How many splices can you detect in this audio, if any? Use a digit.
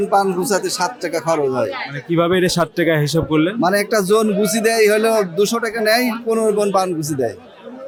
0